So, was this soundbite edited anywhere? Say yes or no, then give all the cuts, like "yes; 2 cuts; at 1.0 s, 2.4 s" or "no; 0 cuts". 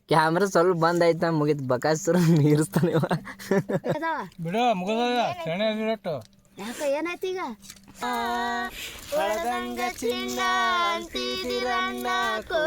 yes; 2 cuts; at 4.0 s, 8.0 s